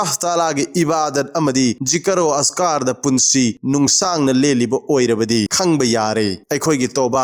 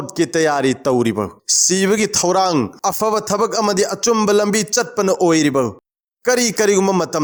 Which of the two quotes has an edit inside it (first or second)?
first